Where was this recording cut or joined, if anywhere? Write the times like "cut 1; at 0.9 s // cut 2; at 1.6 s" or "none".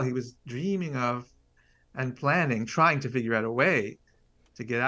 none